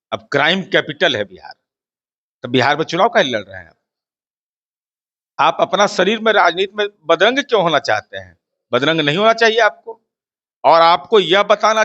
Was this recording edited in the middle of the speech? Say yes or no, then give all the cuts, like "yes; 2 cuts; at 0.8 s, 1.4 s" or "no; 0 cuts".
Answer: no; 0 cuts